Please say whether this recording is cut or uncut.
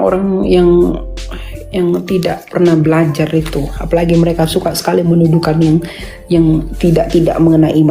uncut